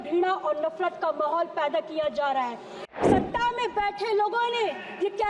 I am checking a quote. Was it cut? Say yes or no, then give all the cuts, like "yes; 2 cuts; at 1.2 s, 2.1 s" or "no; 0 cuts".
yes; 1 cut; at 2.8 s